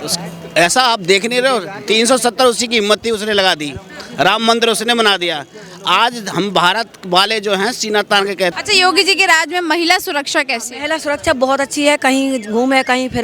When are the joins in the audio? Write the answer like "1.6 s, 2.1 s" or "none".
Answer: 8.5 s